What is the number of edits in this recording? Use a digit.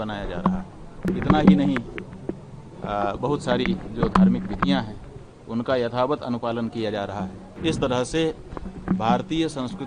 2